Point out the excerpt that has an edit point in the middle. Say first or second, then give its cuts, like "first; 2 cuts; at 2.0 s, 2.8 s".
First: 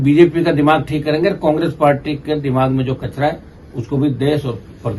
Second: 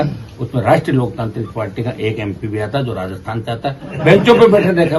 second; 1 cut; at 3.9 s